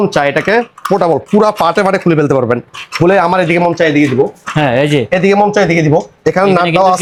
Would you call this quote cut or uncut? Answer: uncut